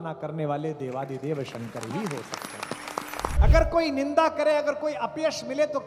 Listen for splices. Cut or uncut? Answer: cut